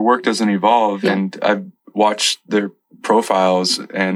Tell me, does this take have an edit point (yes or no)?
yes